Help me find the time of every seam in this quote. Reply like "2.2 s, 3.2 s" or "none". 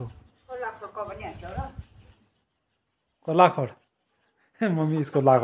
none